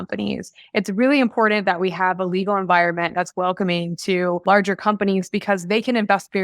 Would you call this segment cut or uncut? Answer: cut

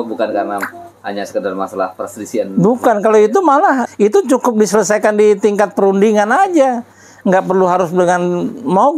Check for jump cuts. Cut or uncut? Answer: cut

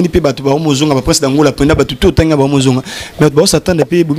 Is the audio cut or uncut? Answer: uncut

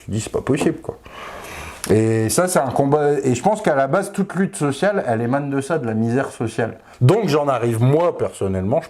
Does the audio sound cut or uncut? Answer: cut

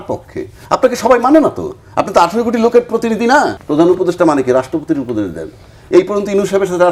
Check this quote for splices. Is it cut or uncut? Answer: cut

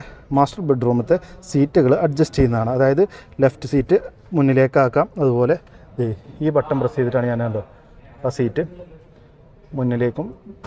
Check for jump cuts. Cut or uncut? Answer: uncut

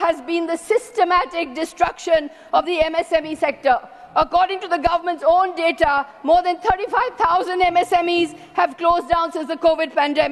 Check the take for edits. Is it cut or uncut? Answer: uncut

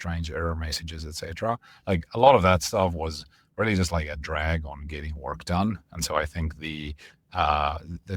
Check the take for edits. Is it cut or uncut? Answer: uncut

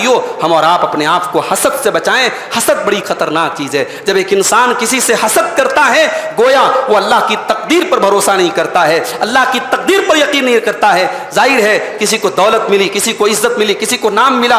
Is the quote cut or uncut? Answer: uncut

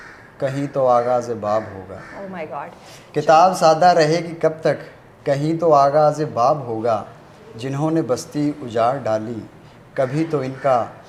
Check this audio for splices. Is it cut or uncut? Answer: uncut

